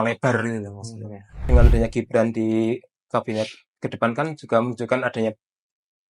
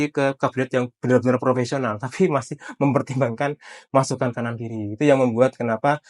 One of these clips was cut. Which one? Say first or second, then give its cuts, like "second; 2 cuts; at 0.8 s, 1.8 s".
first; 1 cut; at 1.5 s